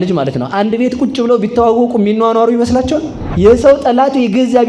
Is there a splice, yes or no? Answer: yes